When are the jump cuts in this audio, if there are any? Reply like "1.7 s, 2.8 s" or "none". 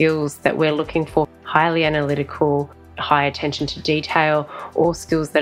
1.3 s, 2.9 s